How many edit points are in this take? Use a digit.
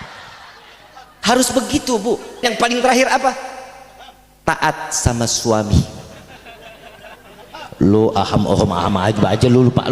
1